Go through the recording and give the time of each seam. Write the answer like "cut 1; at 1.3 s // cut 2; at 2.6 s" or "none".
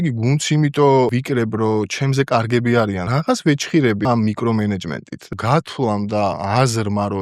cut 1; at 1.1 s // cut 2; at 3.0 s // cut 3; at 4.0 s // cut 4; at 5.3 s // cut 5; at 6.4 s